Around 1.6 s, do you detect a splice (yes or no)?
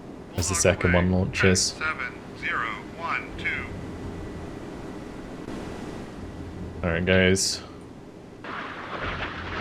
yes